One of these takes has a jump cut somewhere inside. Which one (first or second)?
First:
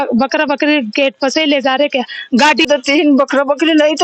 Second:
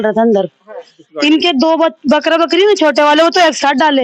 first